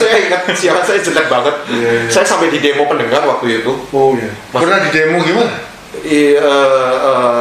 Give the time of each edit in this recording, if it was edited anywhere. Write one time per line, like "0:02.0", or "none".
none